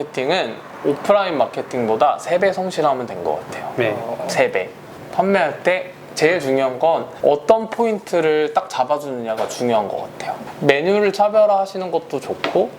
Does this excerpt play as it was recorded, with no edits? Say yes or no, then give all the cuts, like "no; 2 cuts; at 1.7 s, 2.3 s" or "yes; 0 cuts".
no; 2 cuts; at 5.0 s, 10.4 s